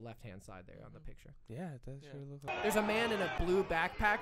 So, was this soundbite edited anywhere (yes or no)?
yes